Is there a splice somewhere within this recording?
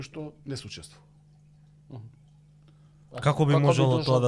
no; 0 cuts

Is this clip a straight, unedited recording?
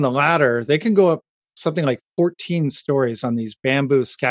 yes; 0 cuts

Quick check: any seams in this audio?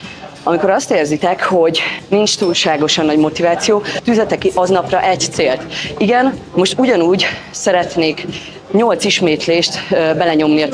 yes; 2 cuts; at 1.9 s, 4.0 s

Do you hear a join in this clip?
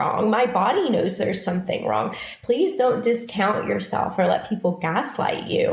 no; 0 cuts

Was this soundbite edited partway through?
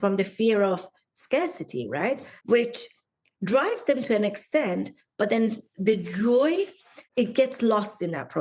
yes; 1 cut; at 2.3 s

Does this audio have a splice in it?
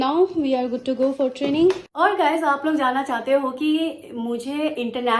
yes; 1 cut; at 1.9 s

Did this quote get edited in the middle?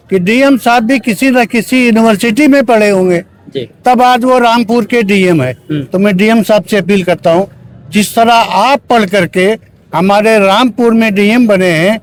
no; 0 cuts

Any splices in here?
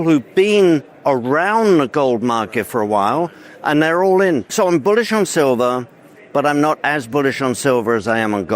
yes; 1 cut; at 4.5 s

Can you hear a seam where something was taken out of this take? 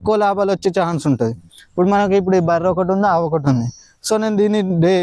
no; 0 cuts

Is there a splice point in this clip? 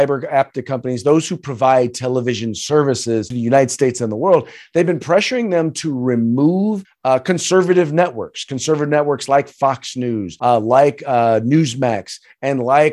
yes; 3 cuts; at 3.3 s, 6.9 s, 10.3 s

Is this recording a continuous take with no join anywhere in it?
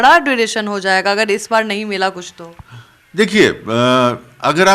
yes; 0 cuts

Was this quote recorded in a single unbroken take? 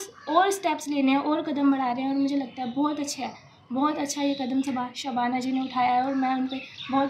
yes; 0 cuts

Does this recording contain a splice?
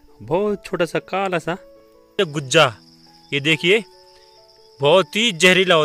yes; 1 cut; at 2.1 s

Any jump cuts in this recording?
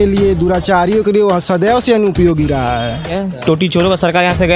yes; 1 cut; at 3.1 s

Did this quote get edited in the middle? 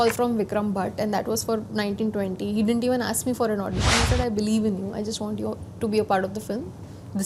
no; 0 cuts

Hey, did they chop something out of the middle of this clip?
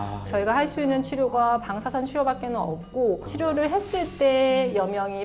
yes; 1 cut; at 3.3 s

